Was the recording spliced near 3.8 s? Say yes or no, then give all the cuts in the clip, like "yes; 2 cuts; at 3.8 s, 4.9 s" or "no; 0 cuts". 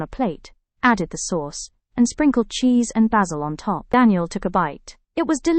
yes; 1 cut; at 3.8 s